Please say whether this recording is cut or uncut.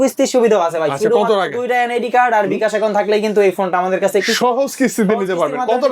uncut